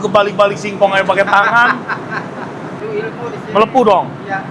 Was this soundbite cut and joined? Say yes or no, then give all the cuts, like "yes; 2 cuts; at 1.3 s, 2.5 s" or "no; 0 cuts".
yes; 1 cut; at 2.8 s